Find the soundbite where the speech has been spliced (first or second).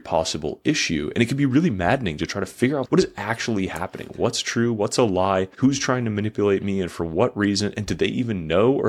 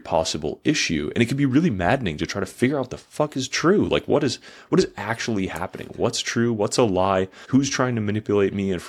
first